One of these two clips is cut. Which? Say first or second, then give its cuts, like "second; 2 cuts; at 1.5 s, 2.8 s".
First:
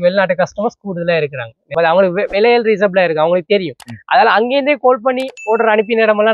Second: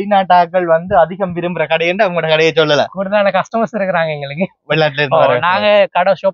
first; 1 cut; at 1.7 s